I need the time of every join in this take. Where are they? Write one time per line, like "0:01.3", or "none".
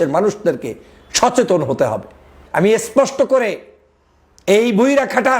0:02.4